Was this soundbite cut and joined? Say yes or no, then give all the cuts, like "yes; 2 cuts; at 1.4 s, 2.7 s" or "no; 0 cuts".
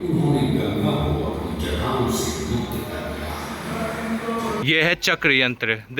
yes; 1 cut; at 4.6 s